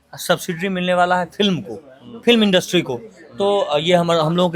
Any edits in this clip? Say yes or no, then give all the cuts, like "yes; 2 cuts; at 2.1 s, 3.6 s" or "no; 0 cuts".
no; 0 cuts